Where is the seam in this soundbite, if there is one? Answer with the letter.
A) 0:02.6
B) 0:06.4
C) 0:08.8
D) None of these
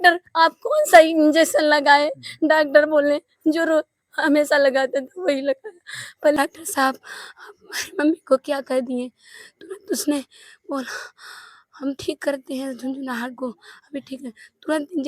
B